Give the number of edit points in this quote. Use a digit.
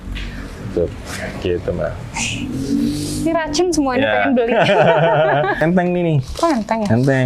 1